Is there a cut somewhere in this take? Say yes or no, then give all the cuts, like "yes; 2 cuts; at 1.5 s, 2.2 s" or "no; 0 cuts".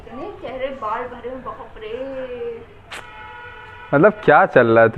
no; 0 cuts